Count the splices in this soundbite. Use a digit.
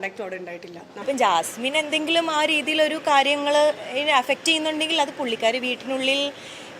1